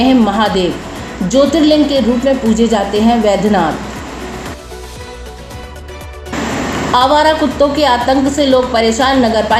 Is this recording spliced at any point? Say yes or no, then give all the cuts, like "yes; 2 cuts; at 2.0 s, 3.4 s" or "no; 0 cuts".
no; 0 cuts